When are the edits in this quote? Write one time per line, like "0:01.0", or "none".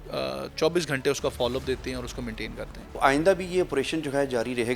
0:02.8